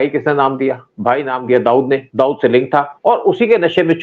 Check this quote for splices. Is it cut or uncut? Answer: uncut